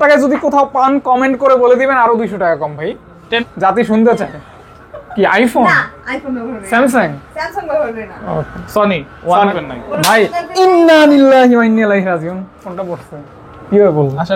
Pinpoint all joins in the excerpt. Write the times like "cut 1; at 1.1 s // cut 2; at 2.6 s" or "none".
cut 1; at 3.4 s // cut 2; at 9.6 s